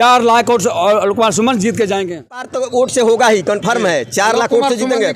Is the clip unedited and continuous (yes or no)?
no